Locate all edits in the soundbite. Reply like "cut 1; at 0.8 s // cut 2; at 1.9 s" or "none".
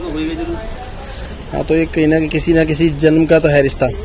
none